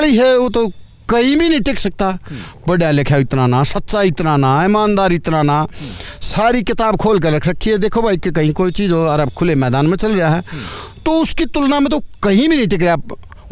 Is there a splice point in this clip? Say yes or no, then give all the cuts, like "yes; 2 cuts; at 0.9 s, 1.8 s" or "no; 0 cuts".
no; 0 cuts